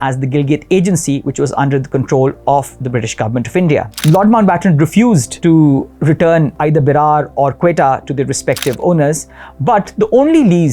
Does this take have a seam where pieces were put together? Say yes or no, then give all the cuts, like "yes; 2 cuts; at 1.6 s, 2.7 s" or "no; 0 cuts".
yes; 3 cuts; at 3.9 s, 5.3 s, 6.5 s